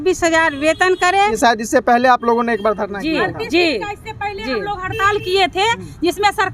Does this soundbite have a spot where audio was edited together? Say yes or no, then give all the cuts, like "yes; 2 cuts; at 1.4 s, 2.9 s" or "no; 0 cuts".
yes; 1 cut; at 1.3 s